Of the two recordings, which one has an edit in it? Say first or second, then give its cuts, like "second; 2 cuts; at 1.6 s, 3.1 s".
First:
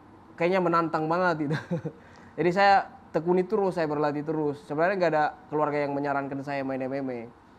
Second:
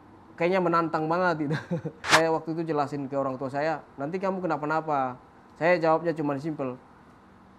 second; 1 cut; at 2.1 s